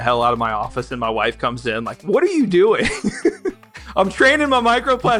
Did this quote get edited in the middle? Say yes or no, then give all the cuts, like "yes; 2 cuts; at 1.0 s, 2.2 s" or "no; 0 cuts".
no; 0 cuts